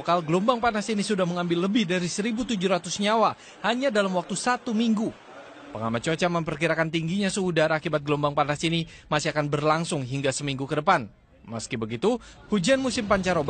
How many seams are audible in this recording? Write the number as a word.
zero